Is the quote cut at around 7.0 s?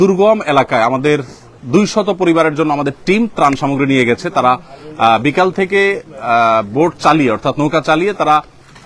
no; 0 cuts

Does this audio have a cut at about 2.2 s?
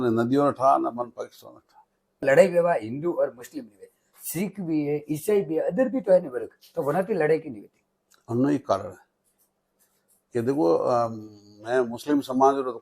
yes; 1 cut; at 2.2 s

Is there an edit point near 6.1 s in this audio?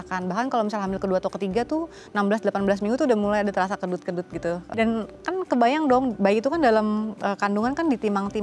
no; 1 cut; at 4.6 s

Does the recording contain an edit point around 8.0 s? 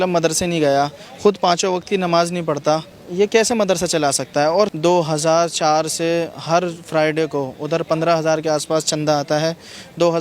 no; 2 cuts; at 3.0 s, 4.7 s

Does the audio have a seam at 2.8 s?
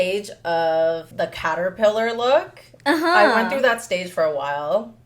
no; 1 cut; at 1.1 s

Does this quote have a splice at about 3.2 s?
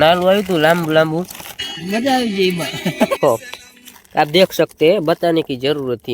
yes; 1 cut; at 3.2 s

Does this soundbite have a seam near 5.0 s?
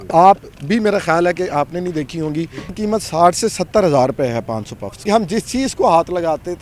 yes; 2 cuts; at 2.7 s, 5.0 s

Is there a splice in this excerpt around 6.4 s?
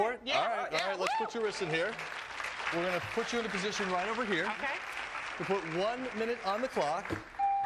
no; 1 cut; at 4.6 s

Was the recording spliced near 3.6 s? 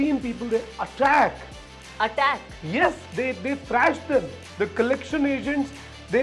no; 0 cuts

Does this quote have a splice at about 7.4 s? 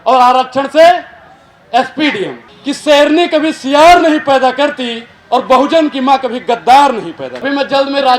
yes; 2 cuts; at 2.5 s, 7.4 s

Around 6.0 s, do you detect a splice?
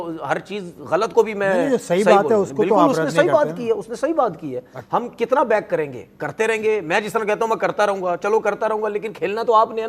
no; 1 cut; at 4.7 s

